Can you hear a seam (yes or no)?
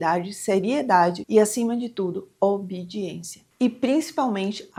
no